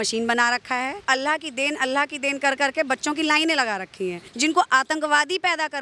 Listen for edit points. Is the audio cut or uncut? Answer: cut